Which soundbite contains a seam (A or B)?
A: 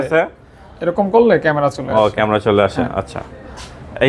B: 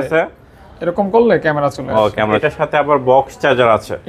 B